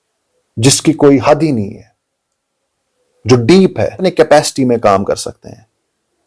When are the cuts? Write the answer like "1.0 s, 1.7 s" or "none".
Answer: 4.0 s